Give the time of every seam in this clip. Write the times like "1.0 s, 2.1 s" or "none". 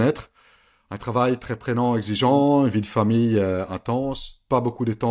none